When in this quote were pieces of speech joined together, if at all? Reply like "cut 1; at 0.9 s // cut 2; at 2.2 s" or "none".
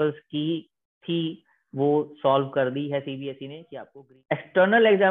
cut 1; at 3.5 s